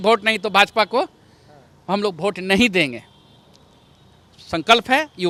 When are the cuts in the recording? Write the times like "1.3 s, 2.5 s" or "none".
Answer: none